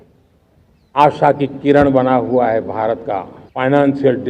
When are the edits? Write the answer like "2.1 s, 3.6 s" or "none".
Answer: 3.4 s

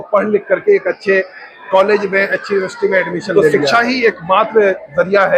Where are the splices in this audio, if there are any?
3.4 s

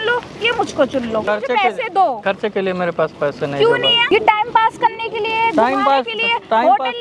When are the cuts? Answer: 1.2 s, 2.2 s, 4.1 s

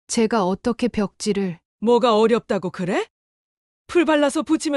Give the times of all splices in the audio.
1.6 s

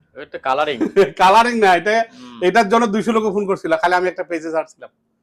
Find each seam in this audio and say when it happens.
none

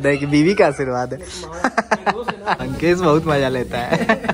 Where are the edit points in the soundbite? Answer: 2.6 s

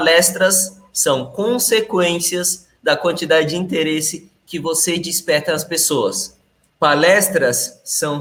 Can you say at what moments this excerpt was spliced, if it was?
none

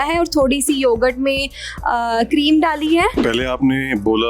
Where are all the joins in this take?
3.2 s

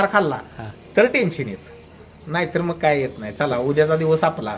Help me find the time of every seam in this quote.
none

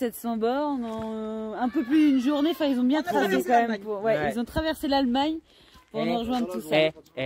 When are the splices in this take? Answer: none

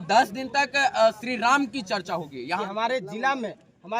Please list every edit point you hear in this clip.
2.6 s

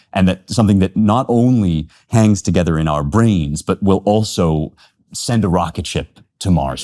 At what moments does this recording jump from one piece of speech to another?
none

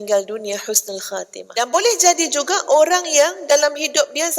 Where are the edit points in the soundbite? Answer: 1.4 s

